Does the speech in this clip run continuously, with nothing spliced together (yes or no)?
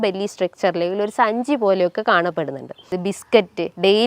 no